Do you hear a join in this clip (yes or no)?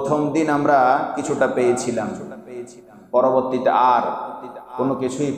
no